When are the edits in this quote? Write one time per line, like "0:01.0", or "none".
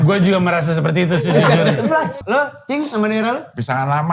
0:02.2